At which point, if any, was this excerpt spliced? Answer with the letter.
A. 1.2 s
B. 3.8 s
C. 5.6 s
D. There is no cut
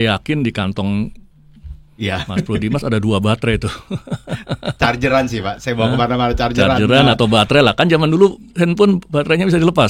D